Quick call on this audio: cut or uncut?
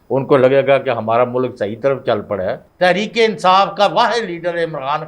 cut